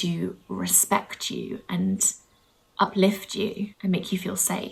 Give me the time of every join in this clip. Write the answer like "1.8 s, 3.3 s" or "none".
3.8 s